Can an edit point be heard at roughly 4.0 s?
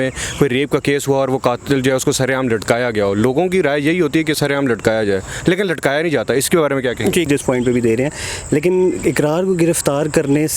no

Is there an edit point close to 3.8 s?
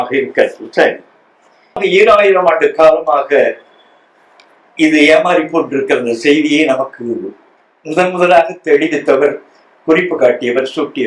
no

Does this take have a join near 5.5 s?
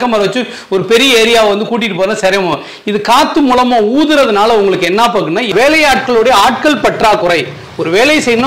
yes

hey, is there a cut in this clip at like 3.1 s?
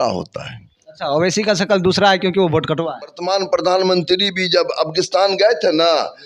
yes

